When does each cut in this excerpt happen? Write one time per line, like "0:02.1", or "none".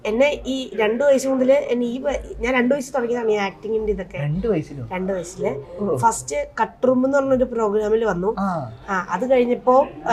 none